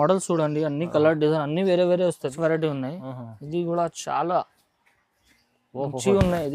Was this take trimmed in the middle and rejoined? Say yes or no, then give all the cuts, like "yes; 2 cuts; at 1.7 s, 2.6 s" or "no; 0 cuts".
yes; 1 cut; at 2.3 s